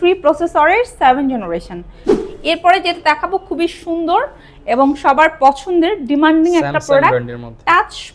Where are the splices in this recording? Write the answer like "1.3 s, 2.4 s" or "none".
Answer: 2.2 s